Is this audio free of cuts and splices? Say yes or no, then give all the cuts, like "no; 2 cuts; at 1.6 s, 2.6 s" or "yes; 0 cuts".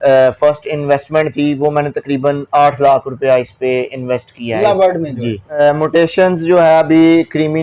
no; 1 cut; at 5.6 s